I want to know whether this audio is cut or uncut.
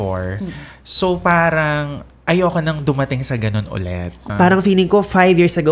cut